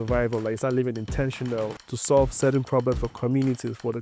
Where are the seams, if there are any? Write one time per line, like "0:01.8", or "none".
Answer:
0:01.9